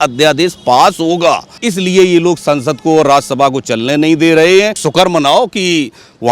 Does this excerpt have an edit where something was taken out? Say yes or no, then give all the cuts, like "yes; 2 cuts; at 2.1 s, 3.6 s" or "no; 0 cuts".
yes; 2 cuts; at 1.6 s, 4.8 s